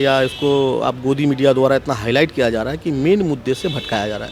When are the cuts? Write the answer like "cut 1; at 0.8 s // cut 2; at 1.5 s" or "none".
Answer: none